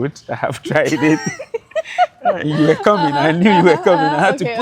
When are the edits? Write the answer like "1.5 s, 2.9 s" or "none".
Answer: none